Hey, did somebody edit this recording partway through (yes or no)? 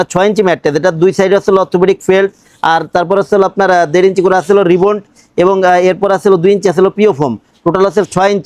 no